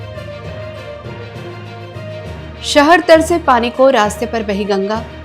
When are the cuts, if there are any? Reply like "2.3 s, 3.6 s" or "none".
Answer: 0.9 s